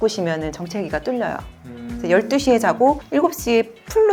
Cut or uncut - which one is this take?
uncut